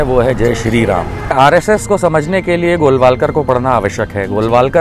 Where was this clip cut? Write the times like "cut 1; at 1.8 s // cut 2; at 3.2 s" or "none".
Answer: cut 1; at 1.3 s